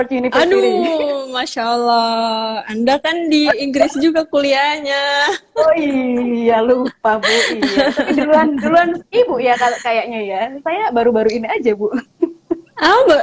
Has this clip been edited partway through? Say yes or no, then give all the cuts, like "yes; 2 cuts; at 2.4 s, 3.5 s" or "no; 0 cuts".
no; 0 cuts